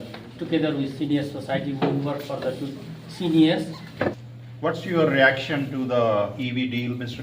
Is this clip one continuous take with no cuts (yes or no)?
no